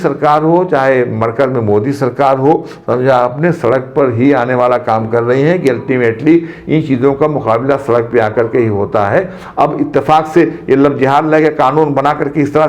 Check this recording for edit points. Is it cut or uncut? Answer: uncut